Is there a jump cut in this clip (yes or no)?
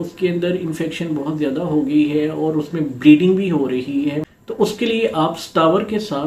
no